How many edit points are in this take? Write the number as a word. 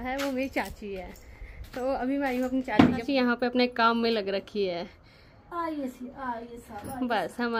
zero